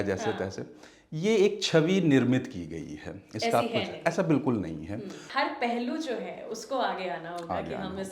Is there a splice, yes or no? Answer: yes